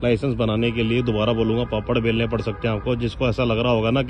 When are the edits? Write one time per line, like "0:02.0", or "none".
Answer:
none